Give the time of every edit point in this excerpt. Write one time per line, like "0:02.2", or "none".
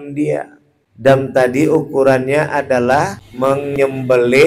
0:01.3
0:03.7